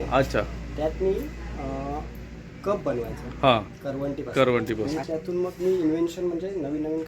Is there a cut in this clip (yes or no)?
yes